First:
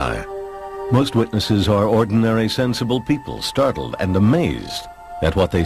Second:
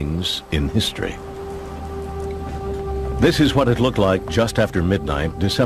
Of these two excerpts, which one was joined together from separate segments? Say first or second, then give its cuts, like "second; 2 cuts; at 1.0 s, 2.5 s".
second; 1 cut; at 3.3 s